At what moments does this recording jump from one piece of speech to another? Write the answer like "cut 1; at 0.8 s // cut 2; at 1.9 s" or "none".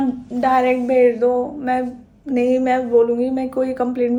none